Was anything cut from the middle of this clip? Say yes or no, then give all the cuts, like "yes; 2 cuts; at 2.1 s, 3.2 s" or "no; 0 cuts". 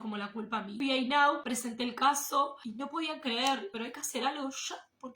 yes; 2 cuts; at 1.4 s, 3.7 s